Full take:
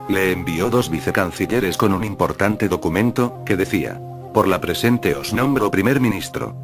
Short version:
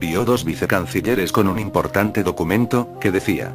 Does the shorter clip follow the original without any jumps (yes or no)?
yes